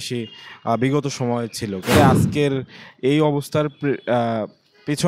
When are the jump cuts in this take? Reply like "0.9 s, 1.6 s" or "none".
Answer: 1.9 s